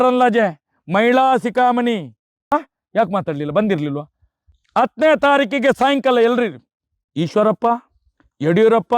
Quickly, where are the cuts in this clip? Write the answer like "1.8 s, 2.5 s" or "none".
2.5 s